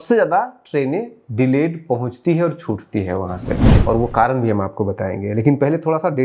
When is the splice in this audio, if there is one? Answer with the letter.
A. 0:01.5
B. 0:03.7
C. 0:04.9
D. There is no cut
B